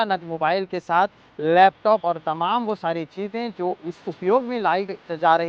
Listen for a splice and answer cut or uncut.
uncut